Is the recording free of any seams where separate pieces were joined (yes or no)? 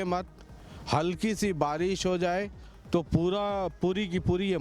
yes